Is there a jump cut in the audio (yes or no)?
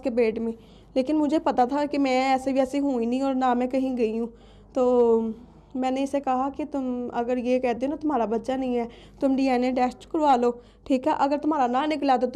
no